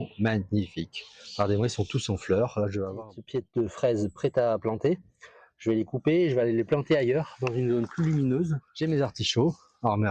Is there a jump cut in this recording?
yes; 2 cuts; at 3.0 s, 8.7 s

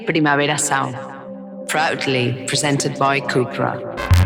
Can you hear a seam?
no; 0 cuts

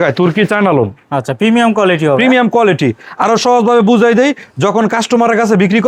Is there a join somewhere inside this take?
no; 0 cuts

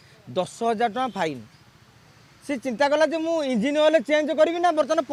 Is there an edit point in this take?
no; 0 cuts

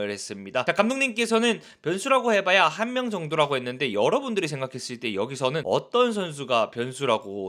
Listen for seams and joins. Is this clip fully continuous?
yes; 0 cuts

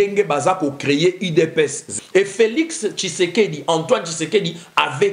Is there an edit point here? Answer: yes; 1 cut; at 1.8 s

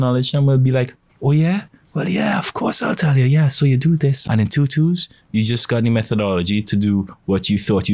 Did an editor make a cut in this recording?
yes; 1 cut; at 4.2 s

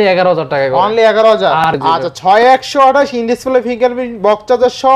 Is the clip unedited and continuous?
no; 1 cut; at 1.7 s

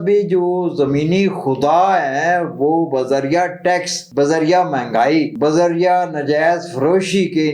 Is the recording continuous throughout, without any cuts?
no; 2 cuts; at 4.0 s, 5.3 s

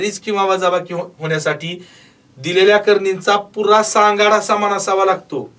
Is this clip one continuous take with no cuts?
yes; 0 cuts

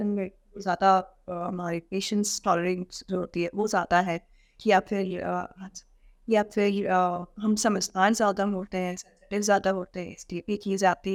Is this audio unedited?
yes; 0 cuts

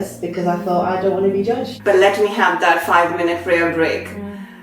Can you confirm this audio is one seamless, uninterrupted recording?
no; 1 cut; at 1.7 s

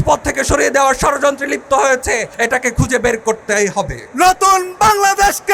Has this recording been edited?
yes; 2 cuts; at 2.3 s, 4.0 s

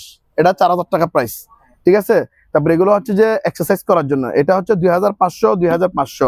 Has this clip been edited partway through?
no; 0 cuts

